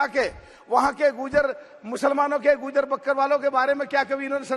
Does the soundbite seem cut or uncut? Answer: uncut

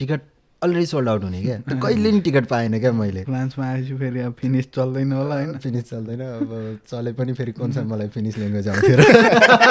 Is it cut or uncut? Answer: cut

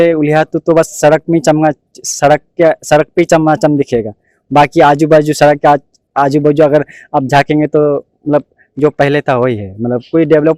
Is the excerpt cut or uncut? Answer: uncut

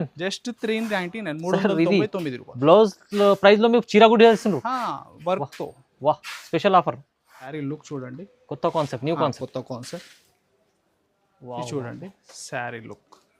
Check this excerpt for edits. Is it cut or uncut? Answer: cut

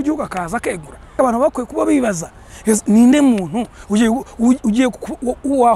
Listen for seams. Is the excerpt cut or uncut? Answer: cut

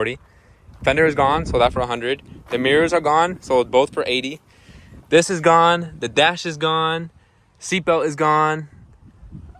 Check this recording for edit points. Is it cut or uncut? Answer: uncut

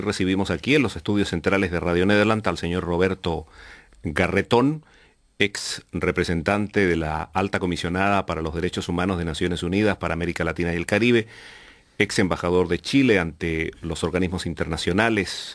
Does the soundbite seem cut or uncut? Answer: uncut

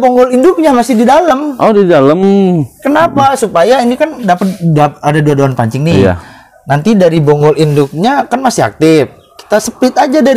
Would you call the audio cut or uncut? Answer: uncut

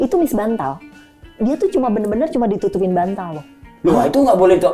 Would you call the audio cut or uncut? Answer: uncut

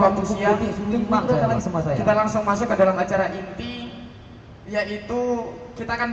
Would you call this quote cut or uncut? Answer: cut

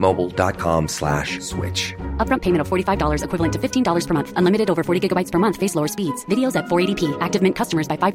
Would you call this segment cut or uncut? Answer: uncut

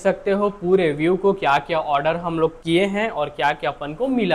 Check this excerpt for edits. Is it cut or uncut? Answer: uncut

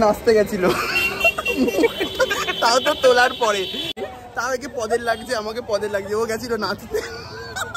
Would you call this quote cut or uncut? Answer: cut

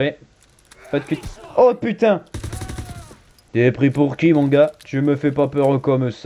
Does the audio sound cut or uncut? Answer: cut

